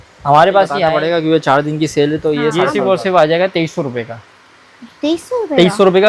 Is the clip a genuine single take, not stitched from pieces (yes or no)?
no